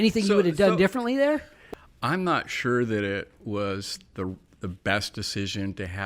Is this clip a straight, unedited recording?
no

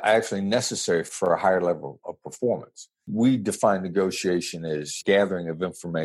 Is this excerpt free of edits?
no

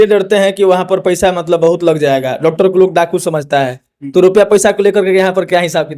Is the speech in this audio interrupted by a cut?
no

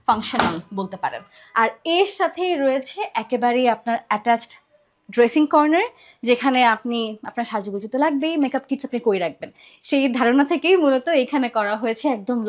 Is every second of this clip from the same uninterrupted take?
yes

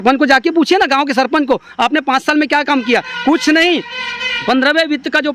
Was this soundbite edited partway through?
no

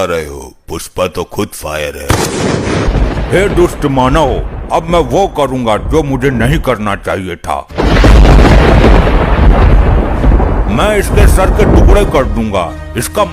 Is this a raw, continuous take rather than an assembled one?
no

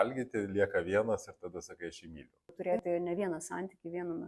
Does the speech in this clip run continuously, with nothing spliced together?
no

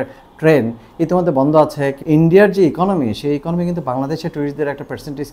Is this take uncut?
no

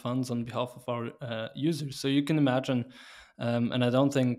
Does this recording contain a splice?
no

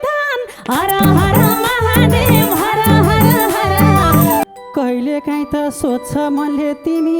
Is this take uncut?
no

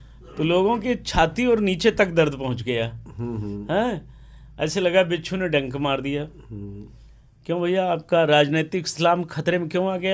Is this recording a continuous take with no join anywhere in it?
yes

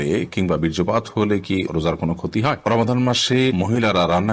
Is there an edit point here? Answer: yes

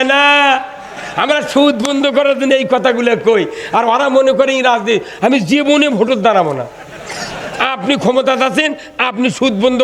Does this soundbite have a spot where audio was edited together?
no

